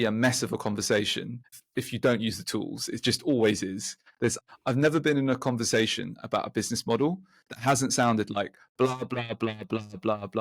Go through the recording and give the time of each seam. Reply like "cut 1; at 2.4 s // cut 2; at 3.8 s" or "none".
cut 1; at 1.5 s // cut 2; at 4.4 s